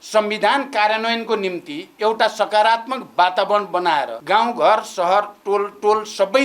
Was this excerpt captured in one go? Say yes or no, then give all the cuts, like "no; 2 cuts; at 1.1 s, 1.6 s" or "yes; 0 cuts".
no; 1 cut; at 4.2 s